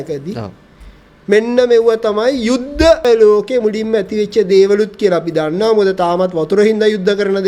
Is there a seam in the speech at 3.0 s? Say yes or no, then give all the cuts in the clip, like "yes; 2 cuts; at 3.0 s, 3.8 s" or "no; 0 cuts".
yes; 1 cut; at 3.0 s